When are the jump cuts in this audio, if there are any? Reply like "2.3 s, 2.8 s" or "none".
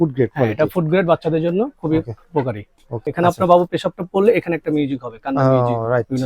3.0 s